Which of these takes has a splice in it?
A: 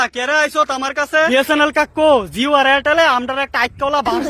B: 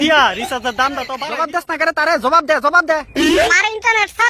B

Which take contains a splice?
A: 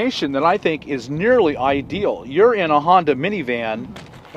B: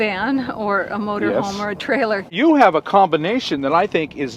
B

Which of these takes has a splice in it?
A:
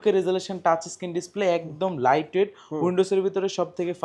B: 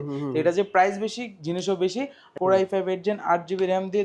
B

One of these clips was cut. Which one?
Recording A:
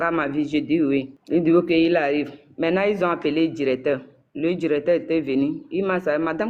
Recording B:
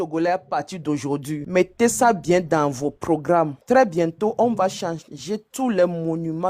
A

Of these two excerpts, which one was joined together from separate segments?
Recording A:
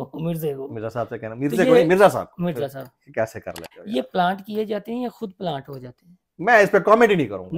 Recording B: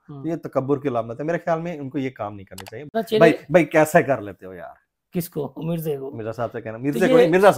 B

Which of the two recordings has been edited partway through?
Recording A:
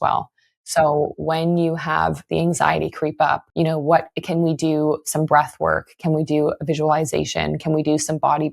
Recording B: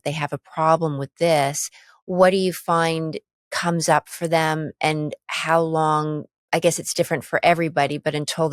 A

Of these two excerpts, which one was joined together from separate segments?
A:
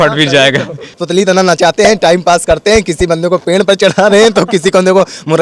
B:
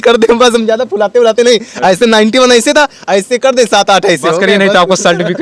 A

